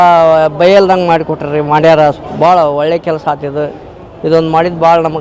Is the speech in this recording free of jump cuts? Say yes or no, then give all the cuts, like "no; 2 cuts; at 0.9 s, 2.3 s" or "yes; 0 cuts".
yes; 0 cuts